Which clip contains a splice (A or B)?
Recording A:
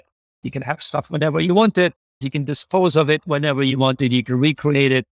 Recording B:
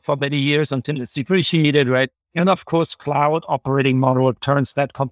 B